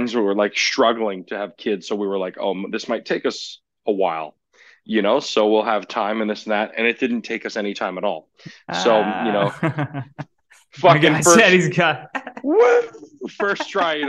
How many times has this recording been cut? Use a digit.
0